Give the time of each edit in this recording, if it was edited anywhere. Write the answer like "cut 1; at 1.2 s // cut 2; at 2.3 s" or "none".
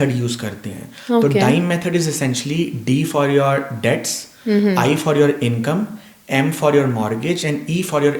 none